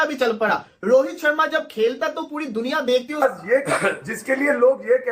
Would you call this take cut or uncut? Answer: cut